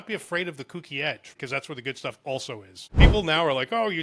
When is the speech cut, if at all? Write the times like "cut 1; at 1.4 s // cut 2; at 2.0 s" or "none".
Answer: cut 1; at 1.3 s // cut 2; at 2.8 s